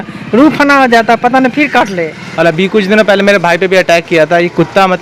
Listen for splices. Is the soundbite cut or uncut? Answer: cut